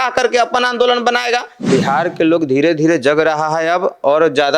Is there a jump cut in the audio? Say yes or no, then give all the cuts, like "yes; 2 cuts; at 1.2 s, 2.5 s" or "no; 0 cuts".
yes; 1 cut; at 1.5 s